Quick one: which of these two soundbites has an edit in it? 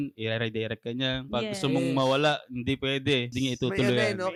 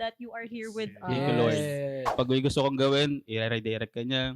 second; 1 cut; at 2.1 s

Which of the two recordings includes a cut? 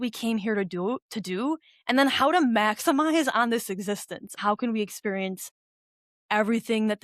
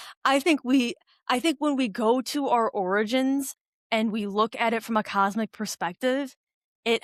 first; 1 cut; at 4.3 s

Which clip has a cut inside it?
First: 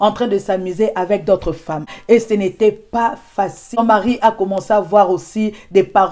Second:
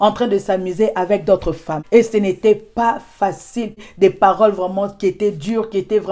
second; 2 cuts; at 1.7 s, 3.5 s

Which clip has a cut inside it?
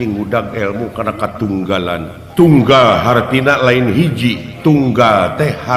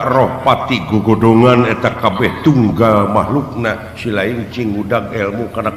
first; 2 cuts; at 2.2 s, 4.5 s

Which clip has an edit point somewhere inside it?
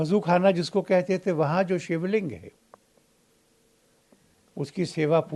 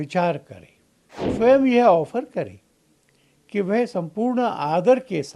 second; 1 cut; at 1.3 s

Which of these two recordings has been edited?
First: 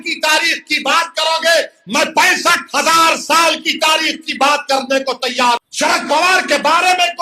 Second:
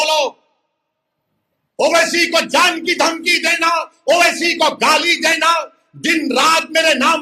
first; 1 cut; at 5.6 s

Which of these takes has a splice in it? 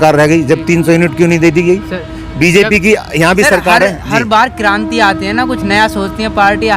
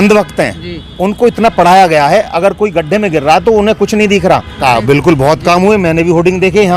second; 1 cut; at 4.5 s

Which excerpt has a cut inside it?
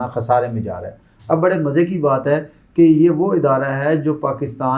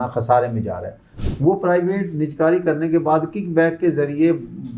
second; 1 cut; at 1.1 s

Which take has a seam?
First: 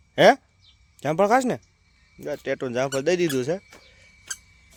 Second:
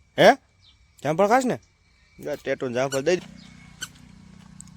second; 1 cut; at 3.2 s

